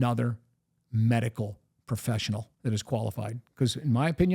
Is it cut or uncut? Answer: cut